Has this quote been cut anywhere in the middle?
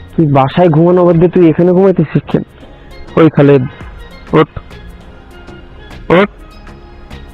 no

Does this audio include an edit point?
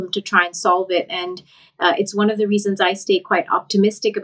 no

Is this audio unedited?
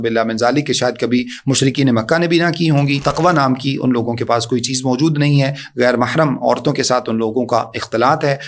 no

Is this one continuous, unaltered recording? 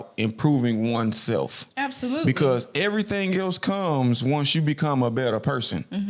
yes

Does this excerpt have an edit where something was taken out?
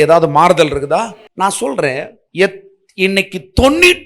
yes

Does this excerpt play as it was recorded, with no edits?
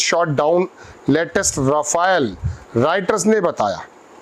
yes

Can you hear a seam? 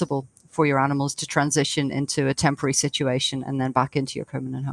no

